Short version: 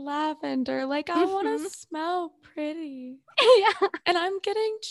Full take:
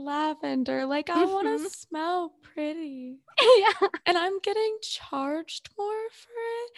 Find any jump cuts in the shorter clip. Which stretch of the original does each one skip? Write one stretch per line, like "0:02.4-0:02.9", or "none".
none